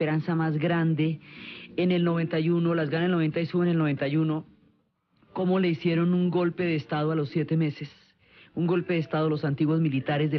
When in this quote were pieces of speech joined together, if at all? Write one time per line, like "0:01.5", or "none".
0:09.2